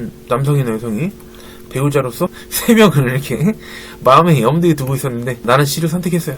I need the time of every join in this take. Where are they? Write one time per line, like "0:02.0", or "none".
0:02.5
0:05.4